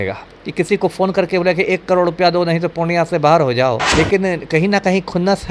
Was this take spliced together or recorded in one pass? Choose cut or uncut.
cut